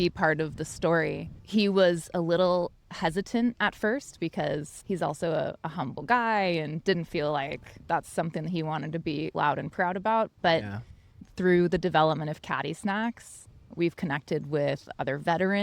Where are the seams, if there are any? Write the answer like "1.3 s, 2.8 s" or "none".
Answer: 1.3 s, 4.7 s